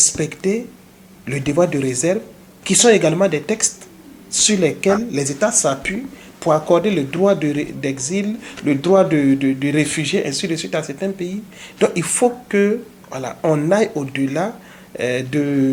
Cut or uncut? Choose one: uncut